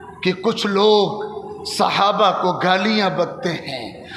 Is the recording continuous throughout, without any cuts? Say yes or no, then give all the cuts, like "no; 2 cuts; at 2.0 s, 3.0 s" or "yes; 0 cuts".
yes; 0 cuts